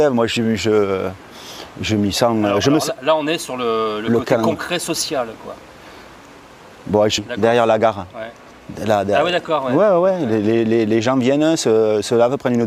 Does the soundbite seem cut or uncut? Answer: uncut